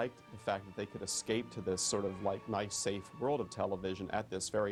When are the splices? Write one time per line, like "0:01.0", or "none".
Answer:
none